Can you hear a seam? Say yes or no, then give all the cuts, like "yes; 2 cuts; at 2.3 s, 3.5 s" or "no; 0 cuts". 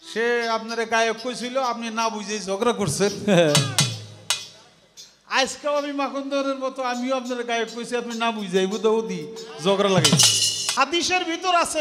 yes; 1 cut; at 10.7 s